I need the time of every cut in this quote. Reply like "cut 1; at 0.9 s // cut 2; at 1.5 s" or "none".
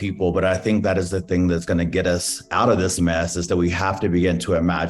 none

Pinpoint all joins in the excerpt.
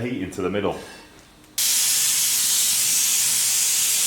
cut 1; at 1.6 s

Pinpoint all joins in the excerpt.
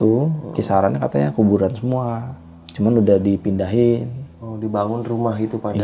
none

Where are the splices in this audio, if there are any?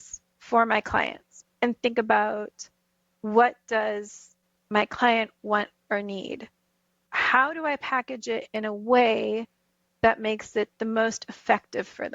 cut 1; at 1.3 s

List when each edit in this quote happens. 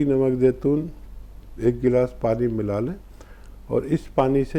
none

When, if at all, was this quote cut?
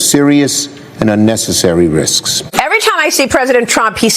cut 1; at 2.3 s

